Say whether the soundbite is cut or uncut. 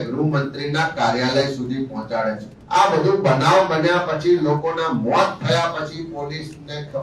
cut